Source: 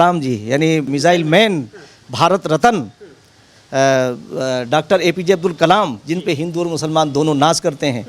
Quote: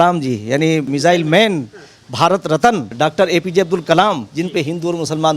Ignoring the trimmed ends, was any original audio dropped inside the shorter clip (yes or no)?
yes